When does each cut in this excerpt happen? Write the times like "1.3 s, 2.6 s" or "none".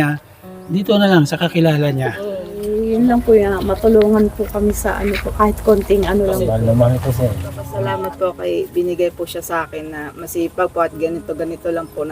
2.7 s, 6.5 s, 7.7 s